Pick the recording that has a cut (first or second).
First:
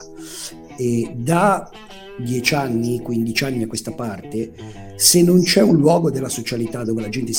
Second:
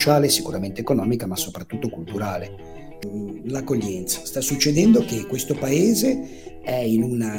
second